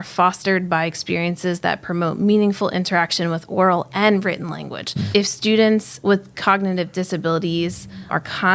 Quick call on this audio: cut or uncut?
cut